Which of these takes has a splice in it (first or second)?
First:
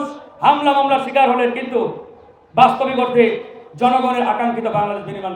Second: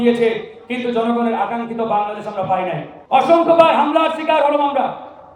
second